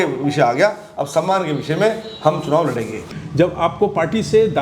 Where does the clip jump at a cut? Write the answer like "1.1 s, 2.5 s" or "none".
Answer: 3.1 s